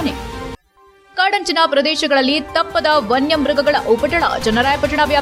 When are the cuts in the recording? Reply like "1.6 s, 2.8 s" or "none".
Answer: none